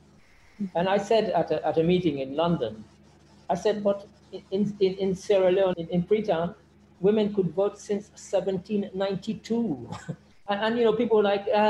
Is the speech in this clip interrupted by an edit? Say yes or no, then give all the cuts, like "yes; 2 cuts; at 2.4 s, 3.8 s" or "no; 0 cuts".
yes; 2 cuts; at 5.7 s, 10.3 s